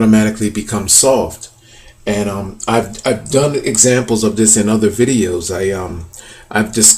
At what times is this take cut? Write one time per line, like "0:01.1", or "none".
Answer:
0:04.1